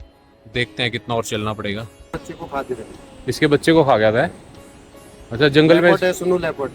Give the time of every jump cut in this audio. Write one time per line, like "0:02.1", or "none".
0:02.1